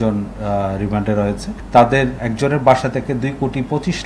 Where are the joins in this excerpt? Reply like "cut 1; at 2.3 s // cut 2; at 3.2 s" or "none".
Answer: cut 1; at 1.5 s // cut 2; at 2.2 s

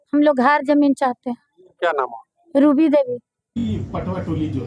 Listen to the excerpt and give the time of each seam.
cut 1; at 3.5 s

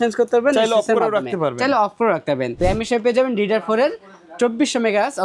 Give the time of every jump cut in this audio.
cut 1; at 2.6 s

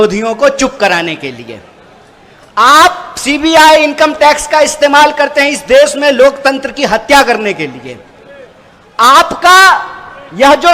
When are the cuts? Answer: none

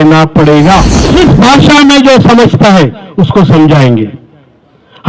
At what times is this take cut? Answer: cut 1; at 1.0 s

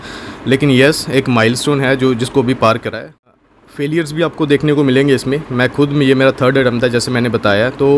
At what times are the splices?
cut 1; at 3.3 s

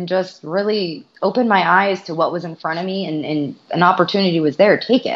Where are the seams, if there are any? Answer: cut 1; at 1.0 s // cut 2; at 3.6 s

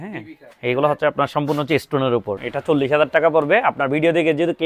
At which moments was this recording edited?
cut 1; at 2.5 s

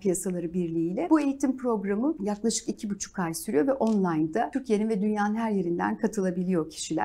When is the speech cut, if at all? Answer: cut 1; at 1.1 s // cut 2; at 2.2 s // cut 3; at 4.6 s

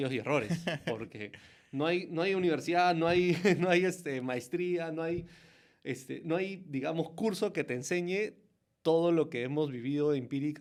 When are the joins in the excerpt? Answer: none

